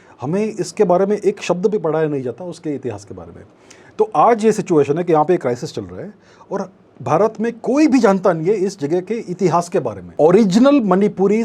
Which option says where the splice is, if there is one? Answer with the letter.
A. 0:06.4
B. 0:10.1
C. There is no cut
B